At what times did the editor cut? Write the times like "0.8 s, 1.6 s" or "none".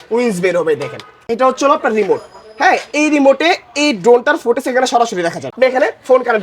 1.2 s, 5.5 s